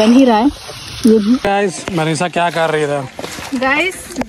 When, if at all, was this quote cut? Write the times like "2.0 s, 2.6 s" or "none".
1.4 s